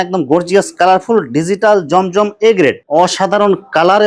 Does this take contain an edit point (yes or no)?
yes